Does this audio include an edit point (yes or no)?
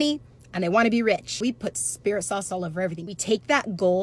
yes